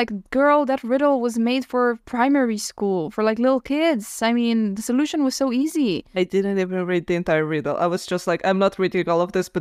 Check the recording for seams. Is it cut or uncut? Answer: cut